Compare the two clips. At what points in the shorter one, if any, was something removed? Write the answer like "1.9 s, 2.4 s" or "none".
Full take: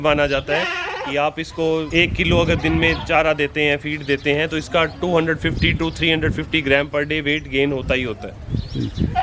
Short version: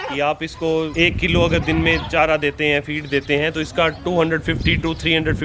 none